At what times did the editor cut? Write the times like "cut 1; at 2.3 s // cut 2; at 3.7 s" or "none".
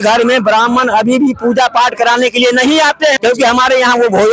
cut 1; at 3.2 s